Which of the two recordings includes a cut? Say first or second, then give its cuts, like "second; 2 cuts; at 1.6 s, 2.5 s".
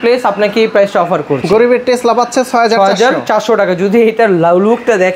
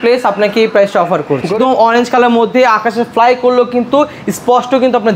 second; 1 cut; at 1.5 s